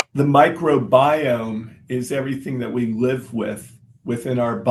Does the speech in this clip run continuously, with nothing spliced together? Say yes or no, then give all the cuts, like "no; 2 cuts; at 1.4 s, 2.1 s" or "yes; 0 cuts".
yes; 0 cuts